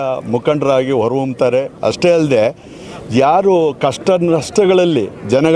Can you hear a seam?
no; 0 cuts

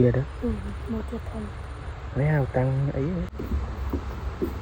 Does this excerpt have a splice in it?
yes; 1 cut; at 3.3 s

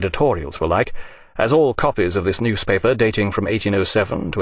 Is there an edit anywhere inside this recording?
no; 0 cuts

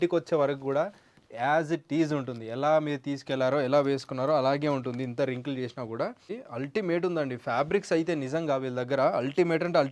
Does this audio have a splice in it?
yes; 1 cut; at 6.4 s

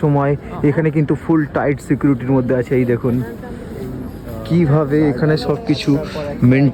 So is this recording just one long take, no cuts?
yes; 0 cuts

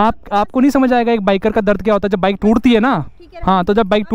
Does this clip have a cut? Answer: no; 0 cuts

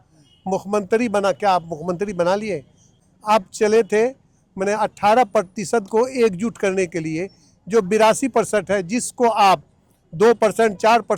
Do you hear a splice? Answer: yes; 1 cut; at 2.8 s

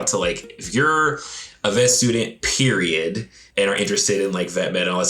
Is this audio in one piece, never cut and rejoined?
no; 1 cut; at 3.4 s

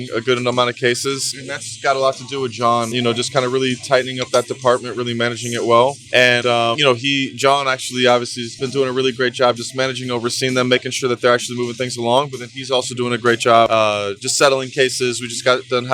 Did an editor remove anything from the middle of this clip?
no; 0 cuts

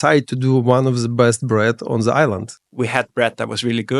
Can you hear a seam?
yes; 1 cut; at 2.5 s

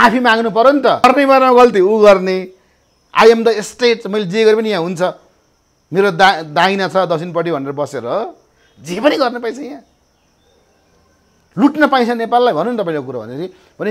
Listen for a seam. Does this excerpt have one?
yes; 1 cut; at 1.0 s

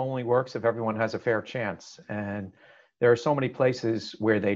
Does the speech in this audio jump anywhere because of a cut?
no; 0 cuts

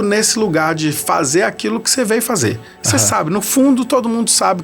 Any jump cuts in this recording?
no; 0 cuts

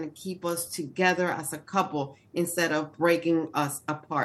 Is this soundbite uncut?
yes; 0 cuts

